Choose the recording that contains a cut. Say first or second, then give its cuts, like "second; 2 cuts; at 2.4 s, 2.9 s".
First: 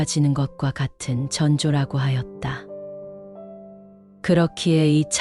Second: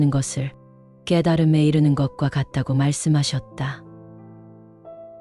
second; 1 cut; at 3.7 s